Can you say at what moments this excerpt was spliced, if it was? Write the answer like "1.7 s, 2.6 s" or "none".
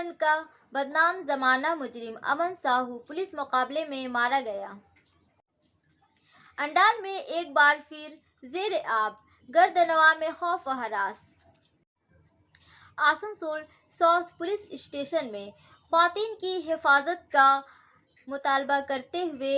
5.5 s, 11.8 s